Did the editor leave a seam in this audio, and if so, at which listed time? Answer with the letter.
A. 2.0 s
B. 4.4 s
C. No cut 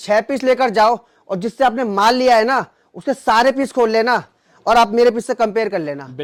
C